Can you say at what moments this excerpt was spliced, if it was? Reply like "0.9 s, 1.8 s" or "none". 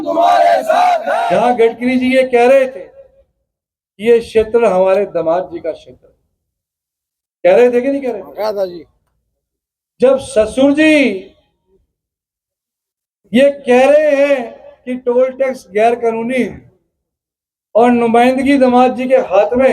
1.2 s